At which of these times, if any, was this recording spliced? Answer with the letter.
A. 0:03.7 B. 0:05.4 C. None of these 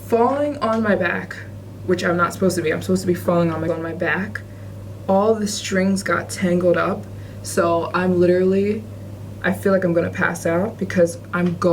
A